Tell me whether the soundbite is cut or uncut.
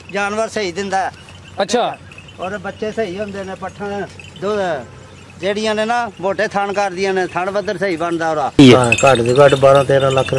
cut